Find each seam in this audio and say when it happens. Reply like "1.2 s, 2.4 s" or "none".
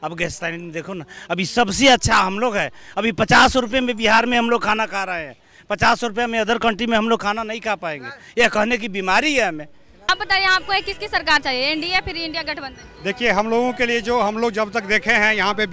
none